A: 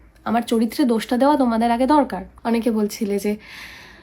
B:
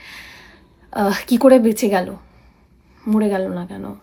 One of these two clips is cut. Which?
A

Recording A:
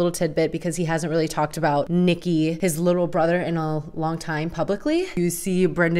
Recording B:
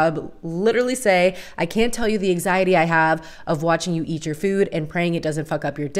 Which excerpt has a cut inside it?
A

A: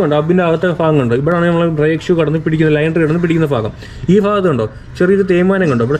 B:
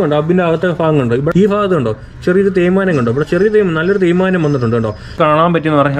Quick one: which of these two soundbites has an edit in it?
B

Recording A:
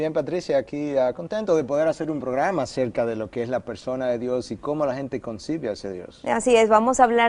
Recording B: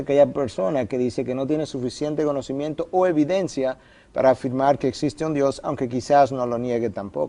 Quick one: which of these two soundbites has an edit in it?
B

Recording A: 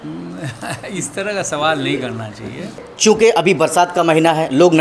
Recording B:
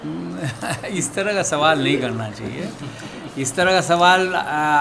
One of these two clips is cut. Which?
A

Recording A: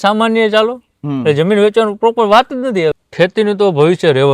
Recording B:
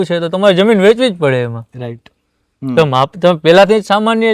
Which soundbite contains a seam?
A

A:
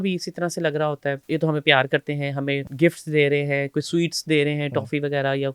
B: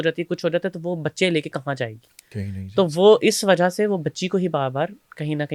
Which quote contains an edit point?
A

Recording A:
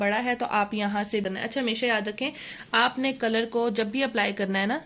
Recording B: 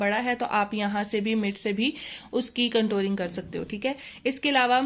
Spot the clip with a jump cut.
A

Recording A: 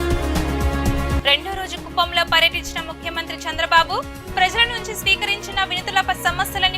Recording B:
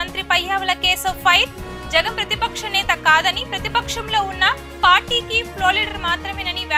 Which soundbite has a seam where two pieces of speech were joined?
A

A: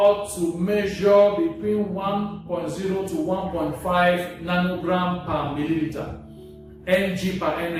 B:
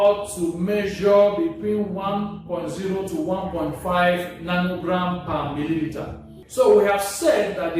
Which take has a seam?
B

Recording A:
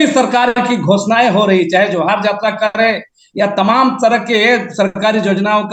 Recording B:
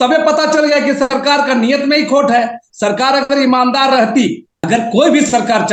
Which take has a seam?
B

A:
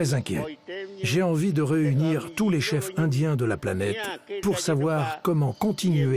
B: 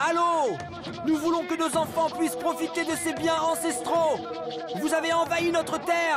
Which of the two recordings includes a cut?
A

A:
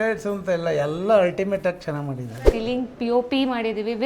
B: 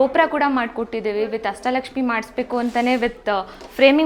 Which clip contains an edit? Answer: A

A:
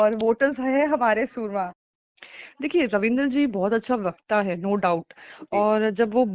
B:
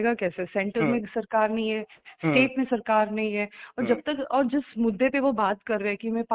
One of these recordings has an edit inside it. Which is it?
A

